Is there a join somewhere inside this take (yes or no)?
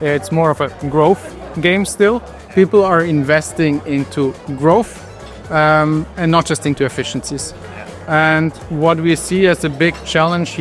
no